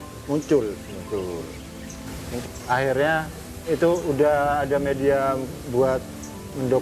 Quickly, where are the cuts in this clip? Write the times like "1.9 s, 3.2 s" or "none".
2.4 s